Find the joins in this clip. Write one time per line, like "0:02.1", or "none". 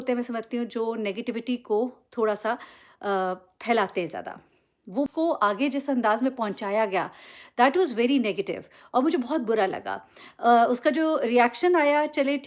0:05.1